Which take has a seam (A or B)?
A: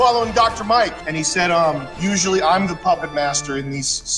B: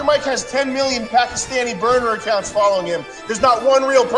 A